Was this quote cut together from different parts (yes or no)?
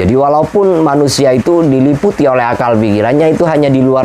no